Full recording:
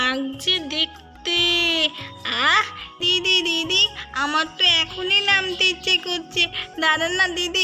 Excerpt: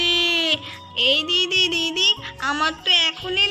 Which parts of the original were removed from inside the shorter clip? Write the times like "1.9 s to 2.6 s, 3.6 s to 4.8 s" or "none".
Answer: 2.3 s to 2.7 s